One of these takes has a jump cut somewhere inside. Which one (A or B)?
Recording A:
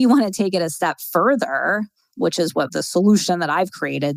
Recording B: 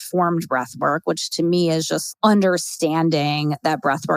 B